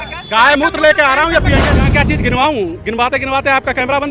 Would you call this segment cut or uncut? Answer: cut